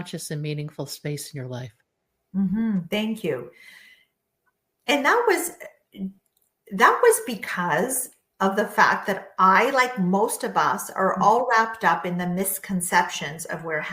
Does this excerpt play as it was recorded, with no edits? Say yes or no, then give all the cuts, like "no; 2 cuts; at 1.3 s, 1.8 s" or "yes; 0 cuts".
yes; 0 cuts